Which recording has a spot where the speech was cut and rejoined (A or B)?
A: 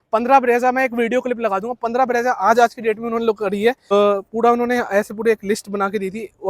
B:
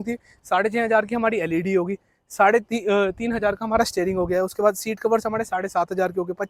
A